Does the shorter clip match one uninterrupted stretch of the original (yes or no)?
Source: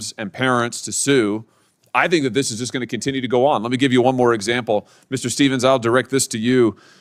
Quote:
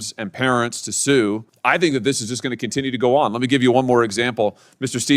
no